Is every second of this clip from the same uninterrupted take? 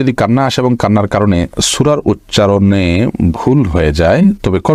yes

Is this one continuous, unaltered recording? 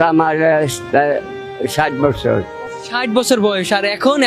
yes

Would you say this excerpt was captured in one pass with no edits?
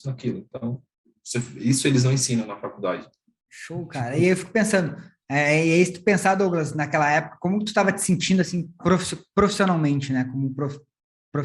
yes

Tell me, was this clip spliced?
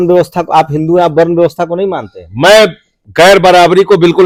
no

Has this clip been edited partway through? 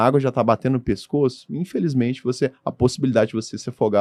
no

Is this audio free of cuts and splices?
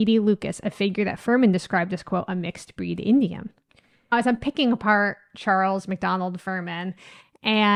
yes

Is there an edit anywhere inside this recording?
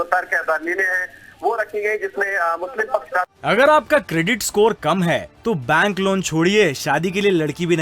yes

